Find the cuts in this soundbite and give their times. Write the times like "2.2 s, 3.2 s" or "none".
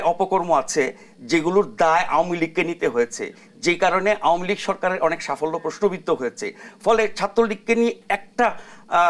none